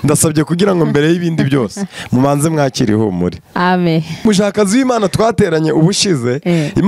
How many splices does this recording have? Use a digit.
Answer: 1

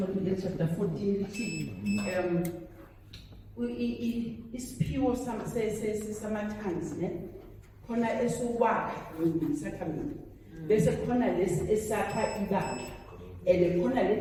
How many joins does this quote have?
0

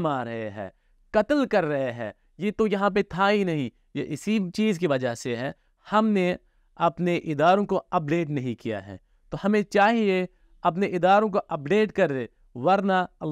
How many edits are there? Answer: 0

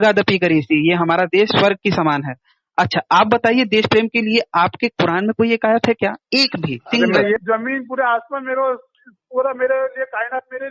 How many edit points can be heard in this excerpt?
1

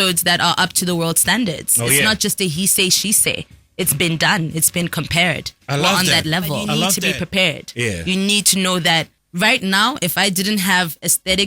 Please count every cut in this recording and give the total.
2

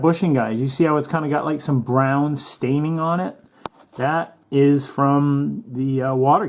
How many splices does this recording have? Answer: 0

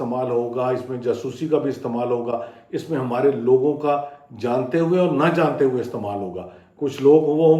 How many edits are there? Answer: 0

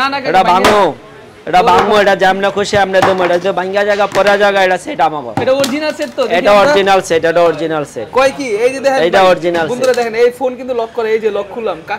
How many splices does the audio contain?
0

